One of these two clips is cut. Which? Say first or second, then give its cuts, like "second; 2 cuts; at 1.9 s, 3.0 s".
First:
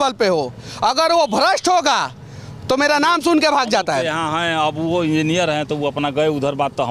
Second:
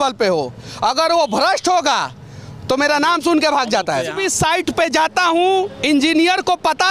second; 1 cut; at 4.2 s